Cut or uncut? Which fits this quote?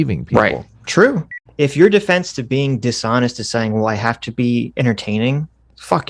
cut